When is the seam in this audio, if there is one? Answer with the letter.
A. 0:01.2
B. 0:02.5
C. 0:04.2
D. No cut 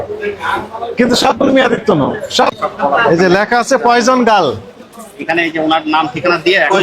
B